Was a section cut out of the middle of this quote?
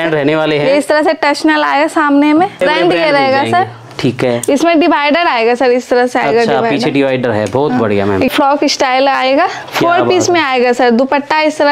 yes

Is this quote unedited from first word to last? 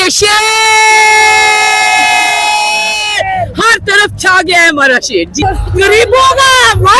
no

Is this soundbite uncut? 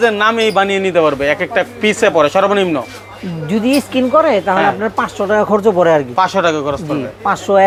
yes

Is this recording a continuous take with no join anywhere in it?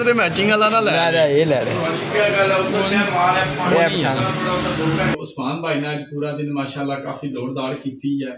no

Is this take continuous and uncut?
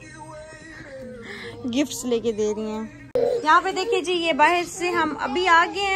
yes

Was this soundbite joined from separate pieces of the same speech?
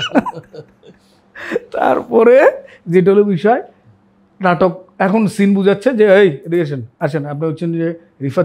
no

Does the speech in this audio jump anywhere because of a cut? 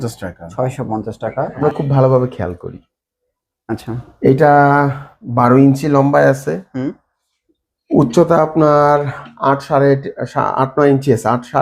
yes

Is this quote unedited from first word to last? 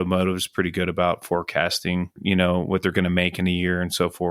no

